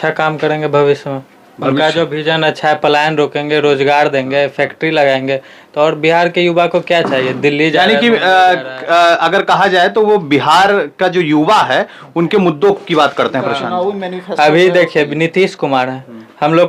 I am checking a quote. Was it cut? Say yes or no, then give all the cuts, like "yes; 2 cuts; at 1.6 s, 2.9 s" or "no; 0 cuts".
no; 0 cuts